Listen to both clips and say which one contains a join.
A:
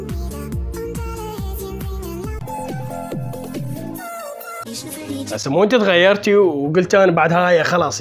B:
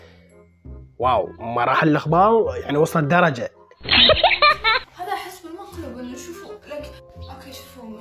B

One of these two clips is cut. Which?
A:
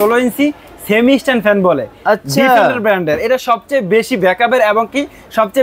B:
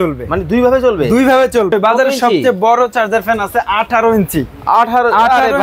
B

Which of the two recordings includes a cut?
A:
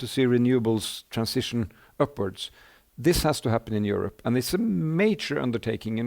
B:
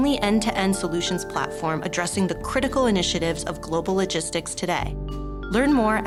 A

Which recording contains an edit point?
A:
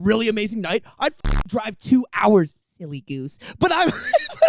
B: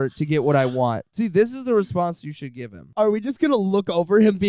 B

